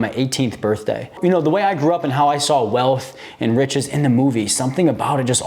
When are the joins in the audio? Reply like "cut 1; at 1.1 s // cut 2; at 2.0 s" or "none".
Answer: cut 1; at 1.1 s